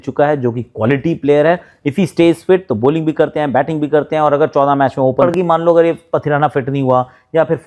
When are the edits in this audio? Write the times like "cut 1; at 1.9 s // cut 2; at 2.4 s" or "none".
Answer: cut 1; at 5.2 s

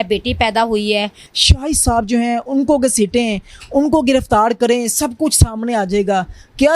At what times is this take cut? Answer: cut 1; at 1.3 s

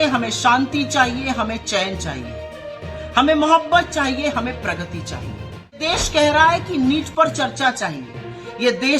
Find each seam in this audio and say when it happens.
cut 1; at 5.8 s

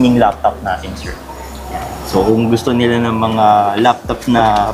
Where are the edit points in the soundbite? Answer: none

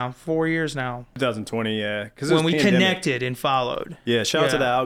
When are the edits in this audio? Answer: cut 1; at 1.1 s

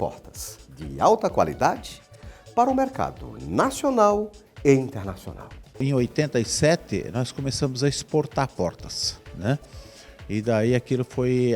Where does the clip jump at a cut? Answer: cut 1; at 5.8 s

